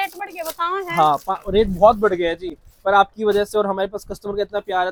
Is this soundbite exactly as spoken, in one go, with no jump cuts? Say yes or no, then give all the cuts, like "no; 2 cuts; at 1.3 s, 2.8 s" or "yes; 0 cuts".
yes; 0 cuts